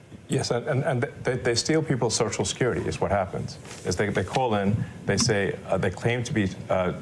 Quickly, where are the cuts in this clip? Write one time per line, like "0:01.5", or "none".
none